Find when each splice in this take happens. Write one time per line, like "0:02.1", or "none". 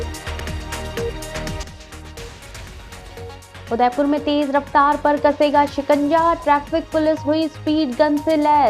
0:01.2